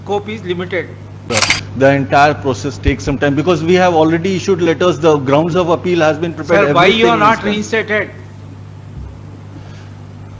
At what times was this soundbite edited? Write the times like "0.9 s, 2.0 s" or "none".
1.2 s